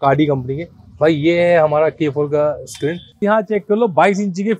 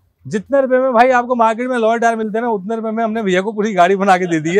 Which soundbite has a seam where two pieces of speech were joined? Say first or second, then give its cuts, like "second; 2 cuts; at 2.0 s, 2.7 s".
first; 1 cut; at 3.2 s